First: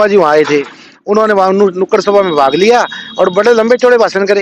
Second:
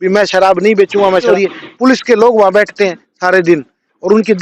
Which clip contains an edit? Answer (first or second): second